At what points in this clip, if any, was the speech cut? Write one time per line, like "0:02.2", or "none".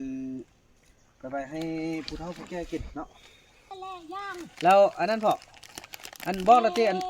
0:03.7